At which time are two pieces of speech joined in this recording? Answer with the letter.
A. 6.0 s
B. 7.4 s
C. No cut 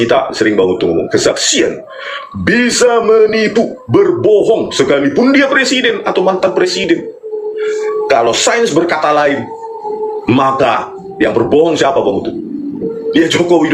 C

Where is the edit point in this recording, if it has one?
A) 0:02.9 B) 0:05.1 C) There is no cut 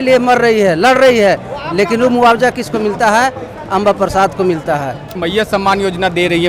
B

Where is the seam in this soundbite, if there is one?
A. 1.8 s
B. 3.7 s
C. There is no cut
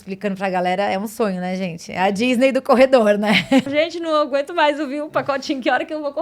B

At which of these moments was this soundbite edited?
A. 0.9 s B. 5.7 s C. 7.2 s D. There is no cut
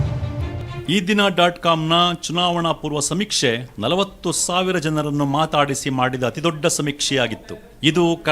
A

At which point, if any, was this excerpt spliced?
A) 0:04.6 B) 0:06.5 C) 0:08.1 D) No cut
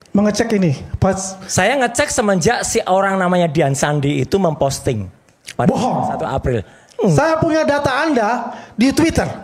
D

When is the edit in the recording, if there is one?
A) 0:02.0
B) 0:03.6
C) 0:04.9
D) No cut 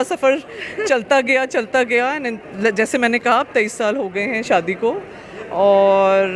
D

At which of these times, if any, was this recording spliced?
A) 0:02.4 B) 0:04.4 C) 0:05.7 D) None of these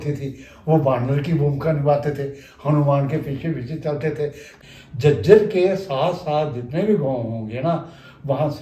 B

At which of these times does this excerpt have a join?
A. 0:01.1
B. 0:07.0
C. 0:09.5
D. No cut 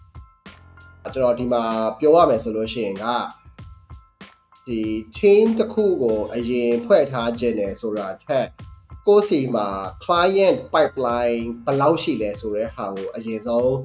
A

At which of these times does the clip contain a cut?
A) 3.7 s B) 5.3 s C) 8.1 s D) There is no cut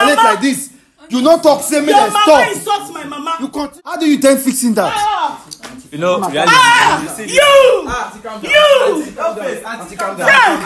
A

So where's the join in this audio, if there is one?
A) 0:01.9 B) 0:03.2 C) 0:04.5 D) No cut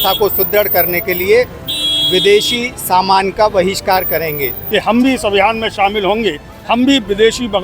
C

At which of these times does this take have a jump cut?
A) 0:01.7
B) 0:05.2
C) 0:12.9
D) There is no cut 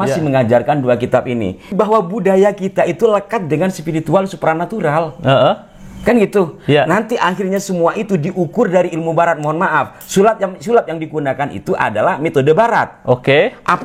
A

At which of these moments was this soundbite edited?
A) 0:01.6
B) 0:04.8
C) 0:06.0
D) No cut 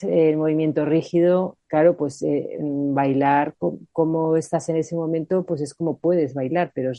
A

